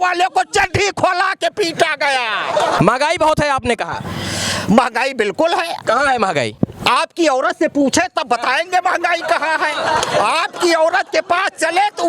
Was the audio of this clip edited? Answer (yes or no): yes